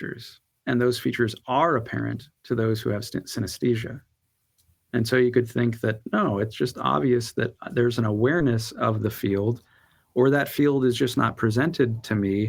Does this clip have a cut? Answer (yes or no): no